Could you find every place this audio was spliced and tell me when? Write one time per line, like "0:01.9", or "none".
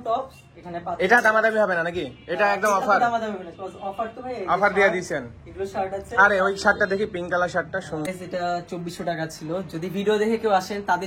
0:08.1